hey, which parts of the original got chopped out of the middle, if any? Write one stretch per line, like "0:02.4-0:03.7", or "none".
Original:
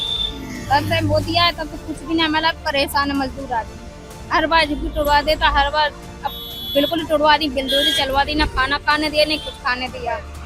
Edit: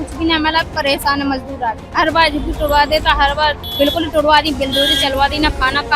0:03.7-0:04.2
0:06.0-0:06.6

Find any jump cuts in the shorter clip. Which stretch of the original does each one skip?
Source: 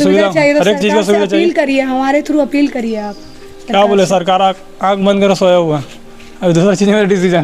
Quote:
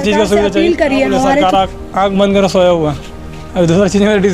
0:02.2-0:04.3

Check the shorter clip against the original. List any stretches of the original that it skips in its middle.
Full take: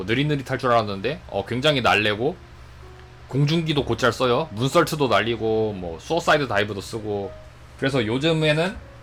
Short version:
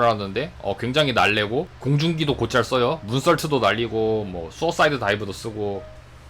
0:02.4-0:03.2

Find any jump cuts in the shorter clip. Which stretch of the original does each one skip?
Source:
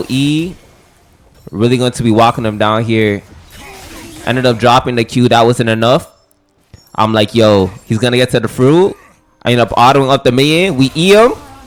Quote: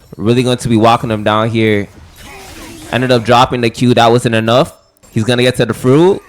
0:06.4-0:07.8

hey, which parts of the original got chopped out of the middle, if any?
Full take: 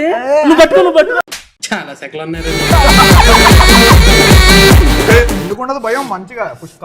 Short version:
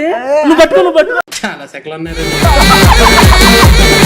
0:01.4-0:01.6

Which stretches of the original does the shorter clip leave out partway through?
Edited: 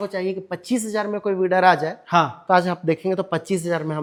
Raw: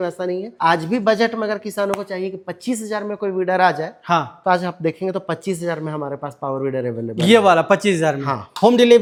none

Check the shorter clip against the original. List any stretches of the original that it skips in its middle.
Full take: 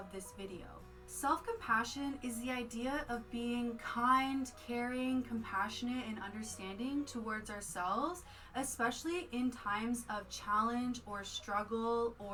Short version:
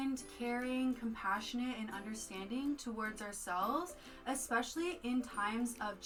none

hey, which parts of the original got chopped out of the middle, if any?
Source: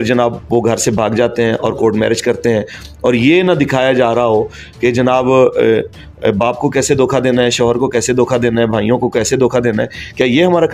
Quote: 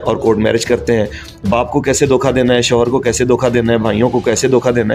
0:03.0-0:06.3

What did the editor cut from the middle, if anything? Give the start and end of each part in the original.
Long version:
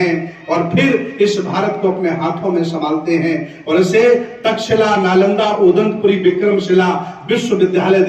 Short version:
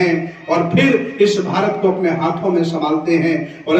none

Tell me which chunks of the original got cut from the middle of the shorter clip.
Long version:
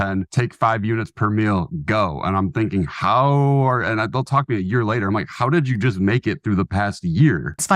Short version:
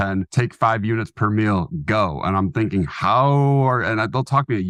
none

